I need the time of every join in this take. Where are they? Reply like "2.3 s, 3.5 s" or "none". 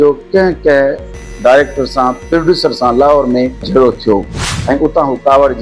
4.5 s